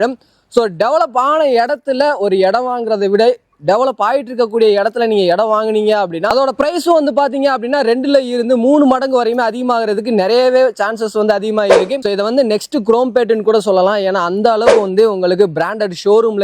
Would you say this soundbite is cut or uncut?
cut